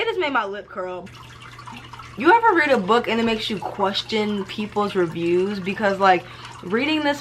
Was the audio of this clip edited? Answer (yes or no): yes